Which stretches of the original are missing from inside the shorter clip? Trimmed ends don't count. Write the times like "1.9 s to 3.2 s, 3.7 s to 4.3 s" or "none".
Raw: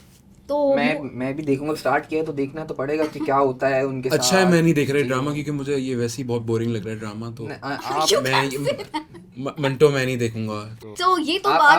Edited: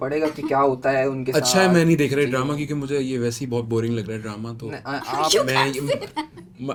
none